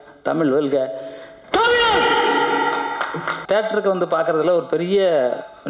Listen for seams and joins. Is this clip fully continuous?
no; 1 cut; at 3.4 s

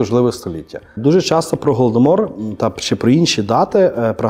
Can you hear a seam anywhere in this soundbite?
yes; 1 cut; at 1.0 s

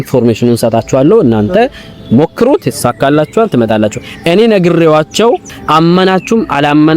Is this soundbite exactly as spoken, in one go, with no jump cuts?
no; 1 cut; at 5.5 s

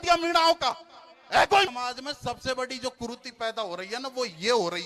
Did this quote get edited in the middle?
yes; 1 cut; at 1.7 s

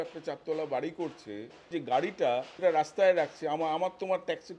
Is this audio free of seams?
no; 2 cuts; at 1.7 s, 2.5 s

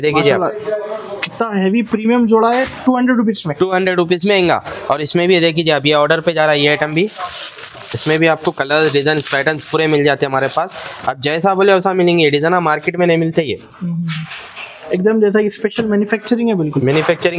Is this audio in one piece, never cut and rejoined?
yes; 0 cuts

